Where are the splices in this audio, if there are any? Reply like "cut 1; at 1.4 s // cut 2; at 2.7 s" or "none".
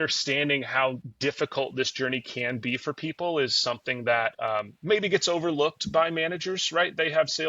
cut 1; at 1.1 s // cut 2; at 4.4 s